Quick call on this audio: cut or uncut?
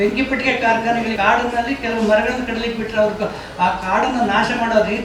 cut